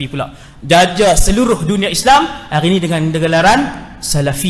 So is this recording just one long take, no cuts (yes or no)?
yes